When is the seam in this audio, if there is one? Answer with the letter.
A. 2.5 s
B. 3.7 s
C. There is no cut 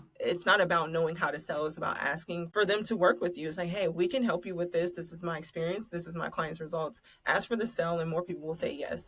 A